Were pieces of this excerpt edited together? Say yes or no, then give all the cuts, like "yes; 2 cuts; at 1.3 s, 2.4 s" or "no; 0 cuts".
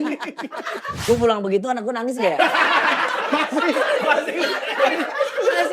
yes; 1 cut; at 1.0 s